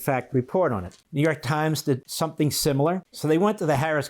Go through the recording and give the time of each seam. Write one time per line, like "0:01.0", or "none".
0:01.0
0:02.1
0:03.1